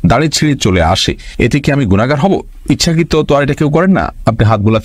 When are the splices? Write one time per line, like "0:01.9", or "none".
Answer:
none

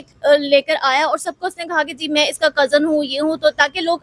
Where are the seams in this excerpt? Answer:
none

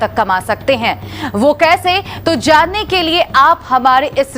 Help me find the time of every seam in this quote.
0:01.1

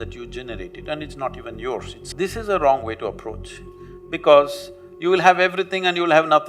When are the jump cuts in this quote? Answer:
0:02.1

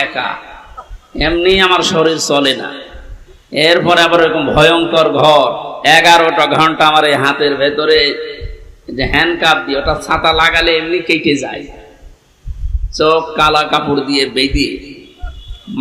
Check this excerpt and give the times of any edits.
0:05.7

